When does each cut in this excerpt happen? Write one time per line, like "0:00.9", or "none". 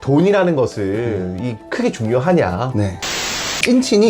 0:03.1